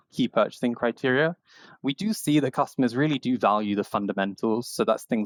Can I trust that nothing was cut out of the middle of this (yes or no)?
yes